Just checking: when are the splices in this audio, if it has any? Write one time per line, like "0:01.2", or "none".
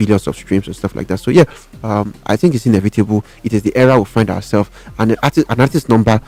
none